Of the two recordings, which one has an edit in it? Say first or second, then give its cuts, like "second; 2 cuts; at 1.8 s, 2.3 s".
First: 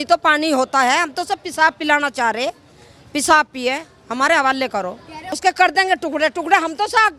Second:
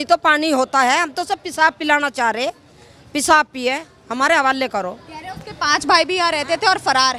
first; 1 cut; at 5.2 s